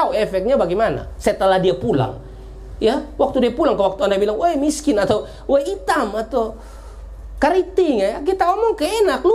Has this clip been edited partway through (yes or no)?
no